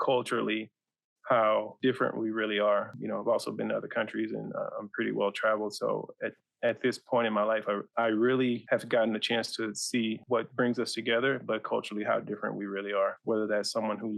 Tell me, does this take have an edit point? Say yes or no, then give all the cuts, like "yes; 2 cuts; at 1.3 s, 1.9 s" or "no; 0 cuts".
yes; 5 cuts; at 1.7 s, 2.9 s, 7.9 s, 8.6 s, 10.2 s